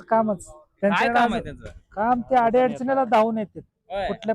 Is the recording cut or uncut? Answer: uncut